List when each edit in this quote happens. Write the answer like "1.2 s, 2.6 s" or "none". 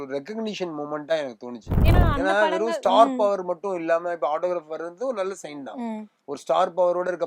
1.7 s